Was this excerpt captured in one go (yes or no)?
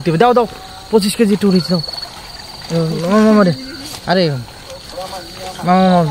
yes